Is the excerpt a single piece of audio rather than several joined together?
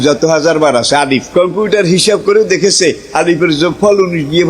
no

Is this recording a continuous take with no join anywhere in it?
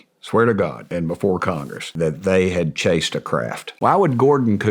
no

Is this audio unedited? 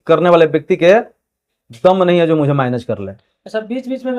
yes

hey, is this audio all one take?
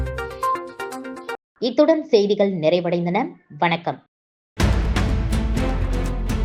yes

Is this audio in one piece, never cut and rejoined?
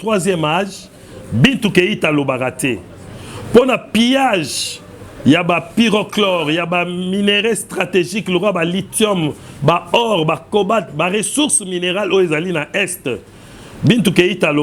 yes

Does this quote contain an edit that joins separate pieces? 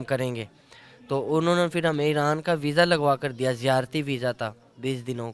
no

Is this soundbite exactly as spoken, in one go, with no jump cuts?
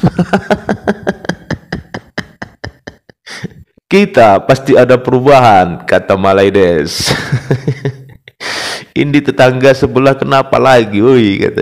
yes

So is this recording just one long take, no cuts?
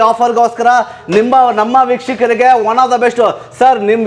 yes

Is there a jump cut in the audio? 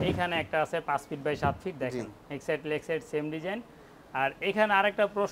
no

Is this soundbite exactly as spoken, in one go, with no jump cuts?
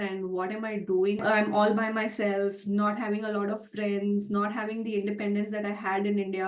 no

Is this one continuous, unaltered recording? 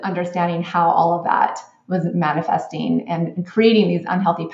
yes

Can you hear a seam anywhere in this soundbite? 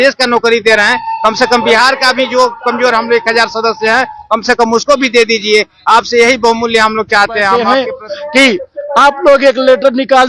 yes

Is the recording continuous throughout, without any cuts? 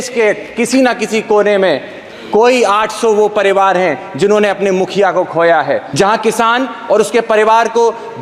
no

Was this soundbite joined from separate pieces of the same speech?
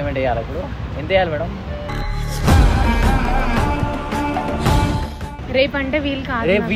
yes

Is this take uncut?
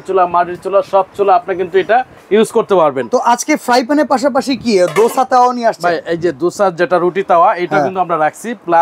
yes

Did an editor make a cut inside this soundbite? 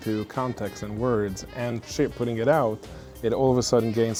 no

